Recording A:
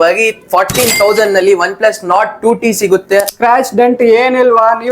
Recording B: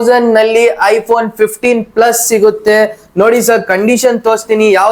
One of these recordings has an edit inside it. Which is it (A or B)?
A